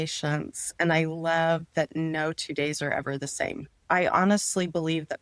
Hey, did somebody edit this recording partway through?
yes; 1 cut; at 3.8 s

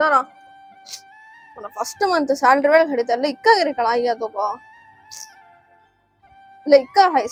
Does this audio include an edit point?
no; 0 cuts

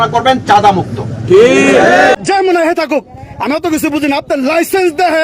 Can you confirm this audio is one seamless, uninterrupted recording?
no; 1 cut; at 2.2 s

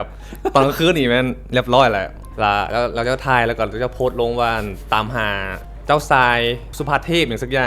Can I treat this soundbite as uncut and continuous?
no; 3 cuts; at 2.2 s, 5.6 s, 6.7 s

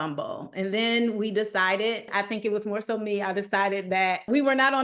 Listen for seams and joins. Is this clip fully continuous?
no; 1 cut; at 2.1 s

